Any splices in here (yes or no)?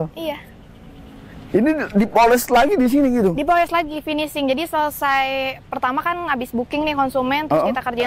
no